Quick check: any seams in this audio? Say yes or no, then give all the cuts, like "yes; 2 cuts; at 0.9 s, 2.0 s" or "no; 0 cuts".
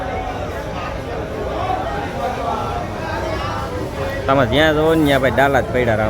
no; 0 cuts